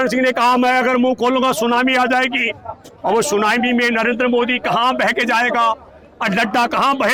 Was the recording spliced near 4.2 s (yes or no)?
no